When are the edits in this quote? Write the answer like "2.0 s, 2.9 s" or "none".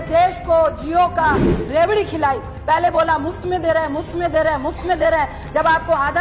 none